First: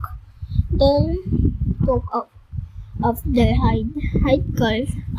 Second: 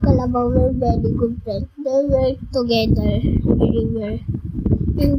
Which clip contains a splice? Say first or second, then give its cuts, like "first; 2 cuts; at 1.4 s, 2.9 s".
second; 1 cut; at 1.9 s